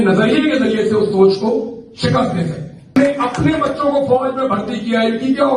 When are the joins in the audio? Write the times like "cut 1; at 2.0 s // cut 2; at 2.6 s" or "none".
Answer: cut 1; at 2.9 s